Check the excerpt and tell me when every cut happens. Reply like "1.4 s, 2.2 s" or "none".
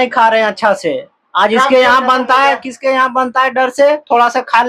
none